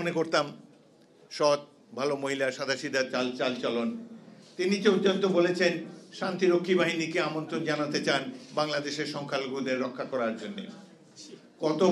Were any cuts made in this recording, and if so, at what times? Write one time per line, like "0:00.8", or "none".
none